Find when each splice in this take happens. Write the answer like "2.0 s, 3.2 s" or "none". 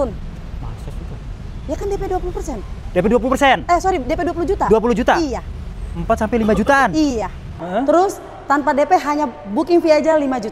7.6 s